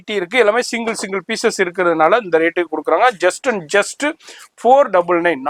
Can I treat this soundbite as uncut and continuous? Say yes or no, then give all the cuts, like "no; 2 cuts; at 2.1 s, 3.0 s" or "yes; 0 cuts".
yes; 0 cuts